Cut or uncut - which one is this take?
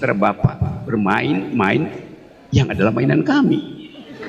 uncut